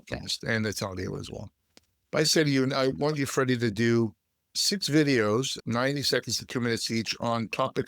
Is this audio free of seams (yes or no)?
no